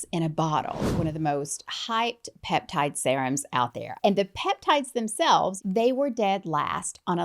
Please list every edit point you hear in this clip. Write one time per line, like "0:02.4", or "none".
0:00.9
0:03.8
0:05.6